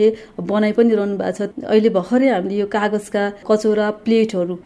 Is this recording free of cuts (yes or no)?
no